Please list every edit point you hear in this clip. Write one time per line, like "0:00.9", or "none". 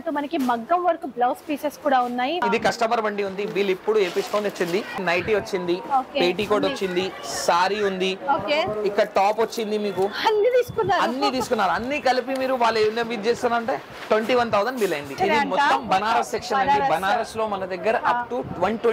0:02.4
0:05.0
0:15.1